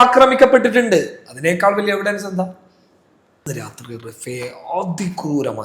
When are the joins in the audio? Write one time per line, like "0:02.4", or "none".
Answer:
0:03.5